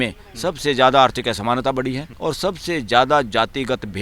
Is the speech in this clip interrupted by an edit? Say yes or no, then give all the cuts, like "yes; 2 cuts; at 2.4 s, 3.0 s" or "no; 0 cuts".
yes; 1 cut; at 2.1 s